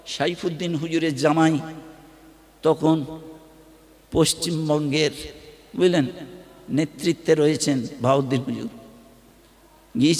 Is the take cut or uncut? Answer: uncut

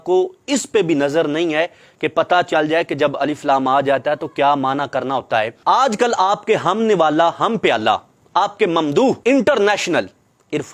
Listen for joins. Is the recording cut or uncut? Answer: cut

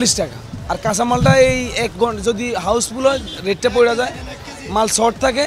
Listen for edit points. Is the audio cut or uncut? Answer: uncut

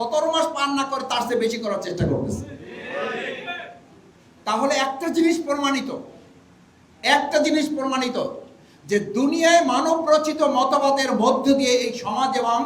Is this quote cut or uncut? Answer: uncut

